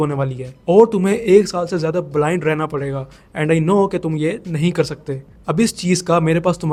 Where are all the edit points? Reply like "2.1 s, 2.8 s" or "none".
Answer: none